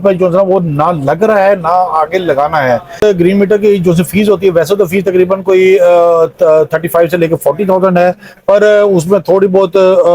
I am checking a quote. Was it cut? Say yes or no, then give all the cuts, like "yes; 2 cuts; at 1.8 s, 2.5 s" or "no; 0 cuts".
yes; 1 cut; at 3.0 s